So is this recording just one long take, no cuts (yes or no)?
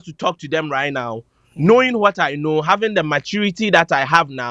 yes